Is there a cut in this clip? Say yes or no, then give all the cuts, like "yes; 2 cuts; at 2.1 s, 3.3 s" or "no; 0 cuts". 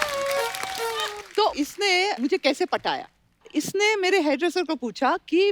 yes; 1 cut; at 1.2 s